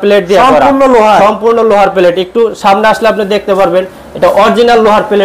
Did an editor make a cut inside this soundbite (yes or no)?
no